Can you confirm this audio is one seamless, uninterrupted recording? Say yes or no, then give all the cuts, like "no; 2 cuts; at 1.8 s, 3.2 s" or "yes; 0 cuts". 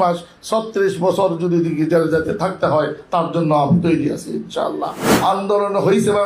no; 1 cut; at 5.0 s